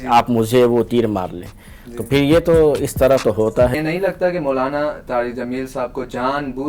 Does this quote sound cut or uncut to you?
cut